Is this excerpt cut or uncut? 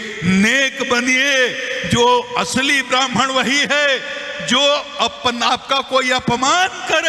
uncut